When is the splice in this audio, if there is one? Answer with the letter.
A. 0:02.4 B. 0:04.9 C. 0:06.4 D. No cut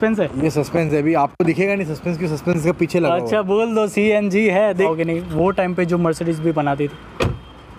B